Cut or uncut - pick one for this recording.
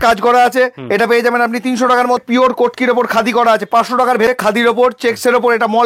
cut